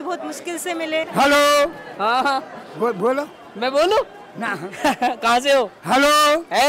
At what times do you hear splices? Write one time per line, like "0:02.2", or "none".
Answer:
0:01.1